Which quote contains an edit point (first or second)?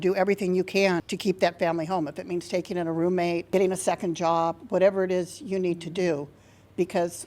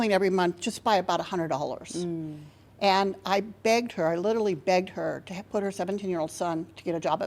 first